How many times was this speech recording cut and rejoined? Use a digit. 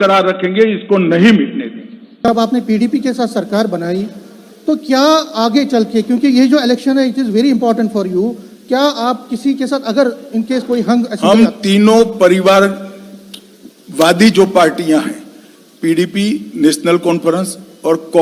1